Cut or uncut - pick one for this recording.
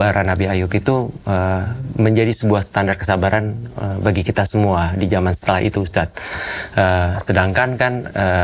uncut